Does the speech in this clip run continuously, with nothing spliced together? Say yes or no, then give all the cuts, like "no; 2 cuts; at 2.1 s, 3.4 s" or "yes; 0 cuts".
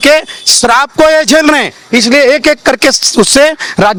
yes; 0 cuts